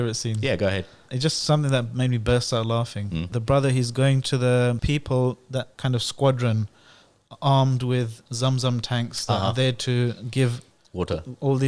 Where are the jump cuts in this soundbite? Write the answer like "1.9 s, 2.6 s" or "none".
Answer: 1.1 s, 3.3 s, 4.8 s, 5.7 s